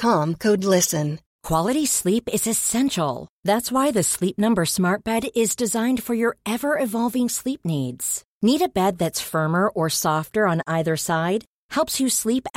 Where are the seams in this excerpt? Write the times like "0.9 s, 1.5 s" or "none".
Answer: 1.3 s